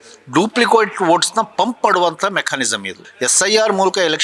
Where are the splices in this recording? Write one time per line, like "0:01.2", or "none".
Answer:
0:03.0